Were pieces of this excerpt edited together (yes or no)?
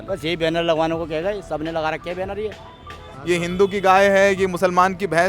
yes